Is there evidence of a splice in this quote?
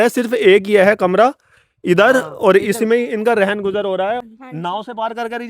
yes; 1 cut; at 4.2 s

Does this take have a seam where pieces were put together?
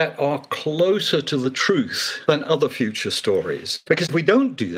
yes; 2 cuts; at 2.0 s, 3.7 s

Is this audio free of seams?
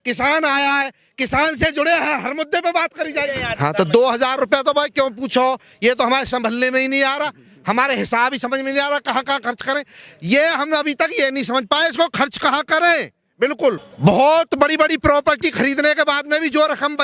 no; 2 cuts; at 3.4 s, 13.9 s

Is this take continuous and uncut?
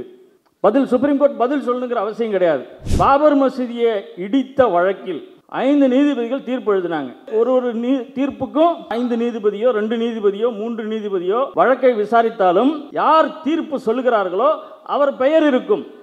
no; 3 cuts; at 2.8 s, 11.5 s, 12.9 s

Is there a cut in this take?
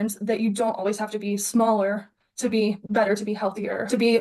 no; 0 cuts

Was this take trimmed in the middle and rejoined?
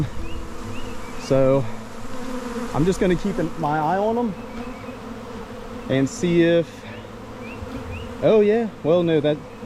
no; 0 cuts

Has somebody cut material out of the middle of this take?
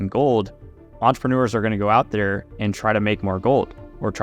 yes; 1 cut; at 0.9 s

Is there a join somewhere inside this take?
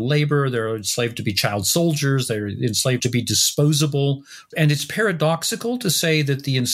yes; 2 cuts; at 3.0 s, 4.3 s

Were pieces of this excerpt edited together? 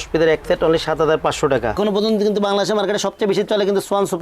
yes; 1 cut; at 1.8 s

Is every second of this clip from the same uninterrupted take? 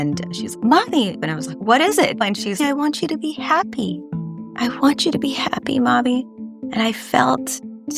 no; 2 cuts; at 1.2 s, 2.2 s

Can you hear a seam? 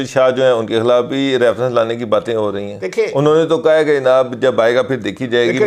no; 0 cuts

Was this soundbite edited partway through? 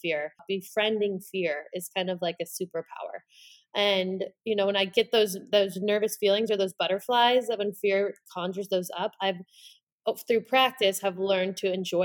no; 0 cuts

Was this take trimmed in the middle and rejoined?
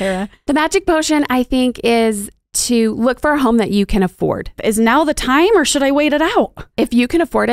yes; 2 cuts; at 4.6 s, 6.6 s

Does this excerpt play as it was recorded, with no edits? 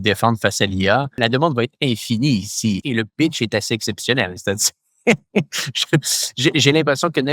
no; 2 cuts; at 1.1 s, 2.8 s

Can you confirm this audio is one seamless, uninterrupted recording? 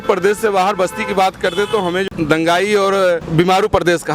no; 2 cuts; at 2.0 s, 3.3 s

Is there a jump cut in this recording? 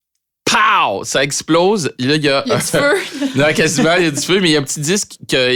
no; 0 cuts

